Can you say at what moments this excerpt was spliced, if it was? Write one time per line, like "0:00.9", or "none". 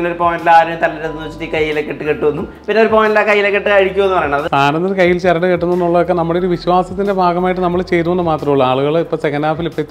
0:04.5